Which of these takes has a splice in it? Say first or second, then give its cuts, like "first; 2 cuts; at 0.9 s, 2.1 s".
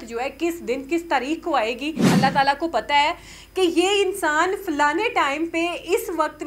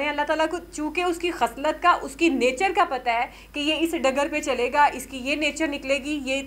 first; 1 cut; at 2.0 s